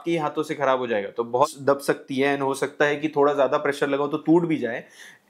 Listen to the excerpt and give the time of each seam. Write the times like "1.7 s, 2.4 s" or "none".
1.5 s